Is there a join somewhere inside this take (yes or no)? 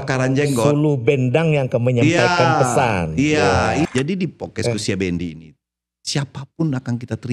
yes